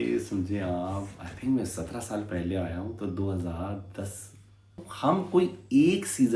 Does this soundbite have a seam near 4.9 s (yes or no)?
yes